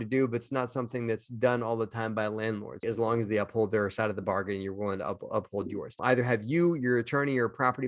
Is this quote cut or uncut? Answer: cut